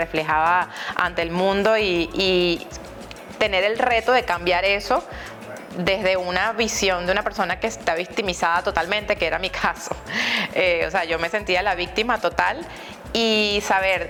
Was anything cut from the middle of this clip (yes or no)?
no